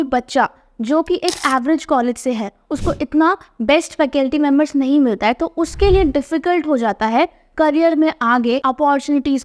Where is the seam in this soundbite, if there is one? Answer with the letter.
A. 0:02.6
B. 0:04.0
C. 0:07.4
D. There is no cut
A